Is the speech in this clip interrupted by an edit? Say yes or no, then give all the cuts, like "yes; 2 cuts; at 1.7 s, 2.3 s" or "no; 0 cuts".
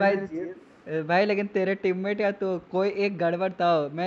no; 0 cuts